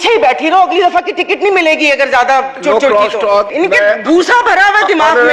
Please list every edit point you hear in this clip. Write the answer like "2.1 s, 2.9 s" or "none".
3.5 s